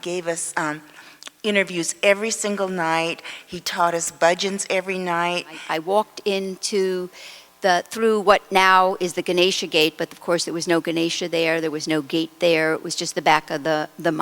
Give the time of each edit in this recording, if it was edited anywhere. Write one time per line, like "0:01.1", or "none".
0:05.7